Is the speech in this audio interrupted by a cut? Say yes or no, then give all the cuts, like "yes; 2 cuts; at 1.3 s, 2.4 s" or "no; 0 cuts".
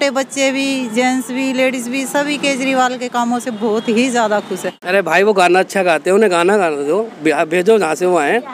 yes; 1 cut; at 4.7 s